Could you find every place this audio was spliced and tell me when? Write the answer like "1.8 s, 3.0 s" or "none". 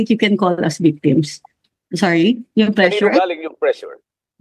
1.5 s